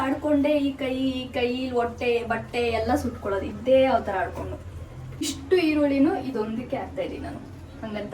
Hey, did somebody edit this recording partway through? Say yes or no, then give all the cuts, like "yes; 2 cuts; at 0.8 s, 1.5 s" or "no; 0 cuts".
yes; 1 cut; at 5.4 s